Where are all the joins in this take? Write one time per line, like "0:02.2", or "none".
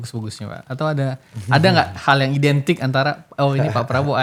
none